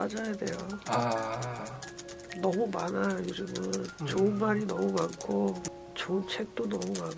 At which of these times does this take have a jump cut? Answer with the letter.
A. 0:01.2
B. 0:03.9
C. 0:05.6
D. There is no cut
C